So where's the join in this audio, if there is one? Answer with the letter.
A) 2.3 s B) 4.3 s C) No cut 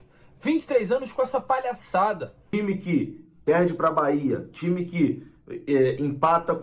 A